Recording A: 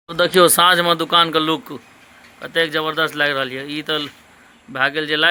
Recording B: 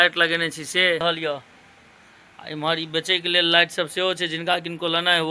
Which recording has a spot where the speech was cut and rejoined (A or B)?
B